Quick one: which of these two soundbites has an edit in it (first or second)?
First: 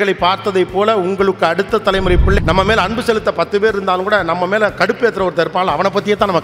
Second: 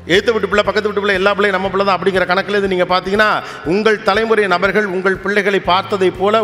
first